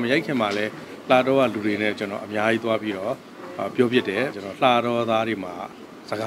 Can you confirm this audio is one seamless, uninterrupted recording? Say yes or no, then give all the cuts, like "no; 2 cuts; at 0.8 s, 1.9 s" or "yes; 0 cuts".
no; 1 cut; at 4.3 s